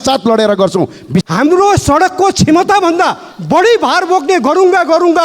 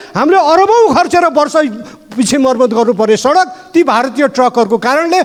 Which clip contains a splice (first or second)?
first